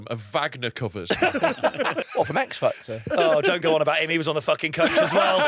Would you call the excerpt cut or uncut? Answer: cut